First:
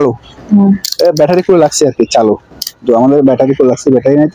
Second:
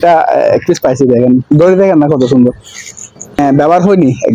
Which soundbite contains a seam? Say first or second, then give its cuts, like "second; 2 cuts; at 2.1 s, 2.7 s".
second; 1 cut; at 3.4 s